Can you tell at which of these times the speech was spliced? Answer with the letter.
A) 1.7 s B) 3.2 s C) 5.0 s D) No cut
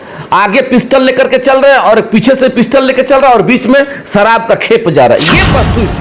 D